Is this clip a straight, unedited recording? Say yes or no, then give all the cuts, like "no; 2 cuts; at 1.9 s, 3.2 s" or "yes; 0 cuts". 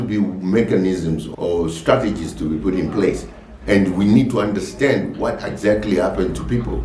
no; 1 cut; at 1.3 s